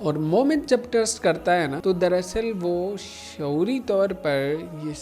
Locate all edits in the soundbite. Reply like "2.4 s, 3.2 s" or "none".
1.8 s